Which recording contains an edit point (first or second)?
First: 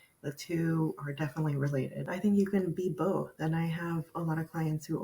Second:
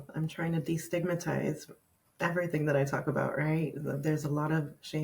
first